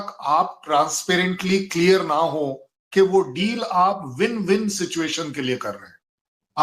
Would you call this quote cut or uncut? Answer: uncut